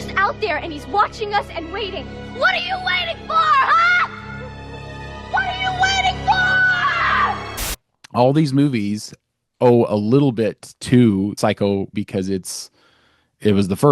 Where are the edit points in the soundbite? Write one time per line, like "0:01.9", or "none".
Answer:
0:07.6
0:11.8